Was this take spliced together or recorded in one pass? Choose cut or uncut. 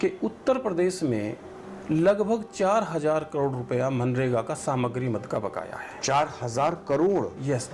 uncut